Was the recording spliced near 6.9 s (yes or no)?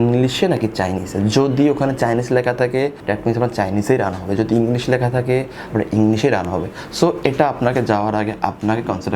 no